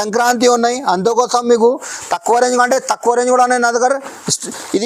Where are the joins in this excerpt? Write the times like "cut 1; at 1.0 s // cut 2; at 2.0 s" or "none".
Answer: none